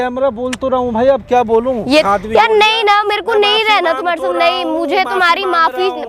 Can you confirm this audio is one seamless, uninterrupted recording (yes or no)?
no